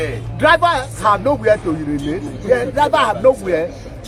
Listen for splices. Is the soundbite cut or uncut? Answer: uncut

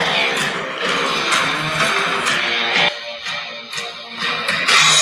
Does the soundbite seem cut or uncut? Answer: uncut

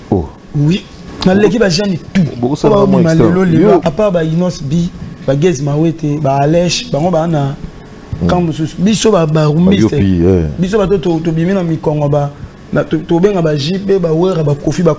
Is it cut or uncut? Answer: cut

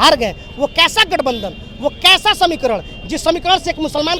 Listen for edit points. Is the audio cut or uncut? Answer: uncut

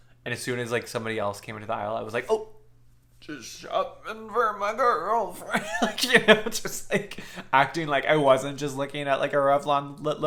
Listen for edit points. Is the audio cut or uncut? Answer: uncut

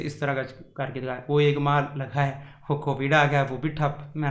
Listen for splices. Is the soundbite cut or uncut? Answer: uncut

